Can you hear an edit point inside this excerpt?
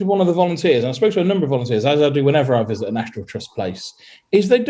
no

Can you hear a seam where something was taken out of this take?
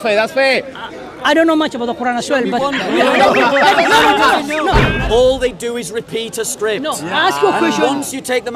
yes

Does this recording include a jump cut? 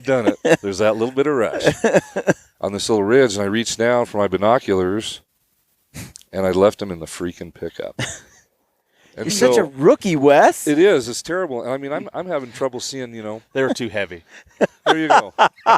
yes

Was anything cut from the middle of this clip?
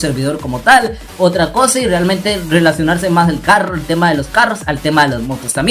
no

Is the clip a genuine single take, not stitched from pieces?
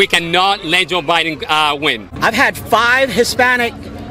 no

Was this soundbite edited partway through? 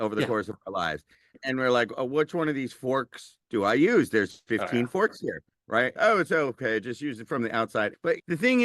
yes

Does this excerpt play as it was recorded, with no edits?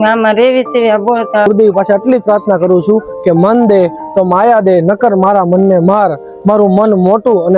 no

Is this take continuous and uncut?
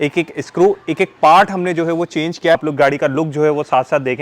no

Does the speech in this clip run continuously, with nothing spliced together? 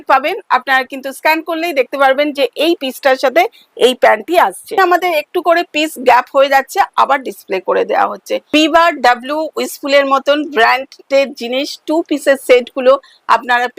no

